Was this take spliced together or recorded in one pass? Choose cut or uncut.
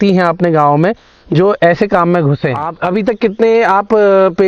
cut